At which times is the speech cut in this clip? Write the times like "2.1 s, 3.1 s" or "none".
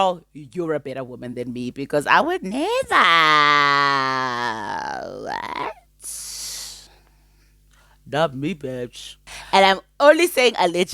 9.3 s